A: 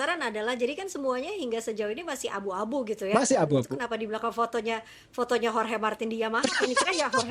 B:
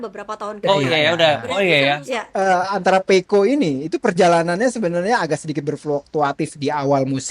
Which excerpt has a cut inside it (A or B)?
B